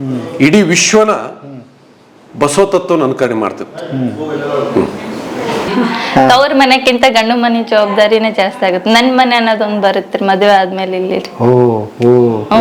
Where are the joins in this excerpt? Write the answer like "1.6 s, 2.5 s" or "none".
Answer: 5.7 s